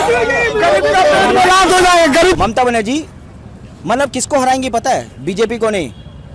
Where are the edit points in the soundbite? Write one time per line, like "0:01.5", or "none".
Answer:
0:02.4